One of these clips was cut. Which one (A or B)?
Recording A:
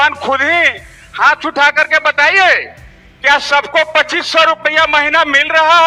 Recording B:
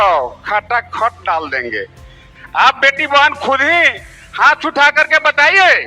B